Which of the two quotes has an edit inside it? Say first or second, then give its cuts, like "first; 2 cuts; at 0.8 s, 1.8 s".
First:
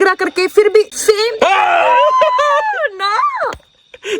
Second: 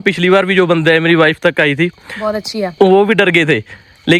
first; 1 cut; at 0.9 s